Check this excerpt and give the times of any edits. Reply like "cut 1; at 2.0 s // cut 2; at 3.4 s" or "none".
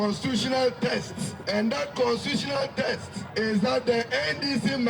cut 1; at 1.3 s // cut 2; at 3.2 s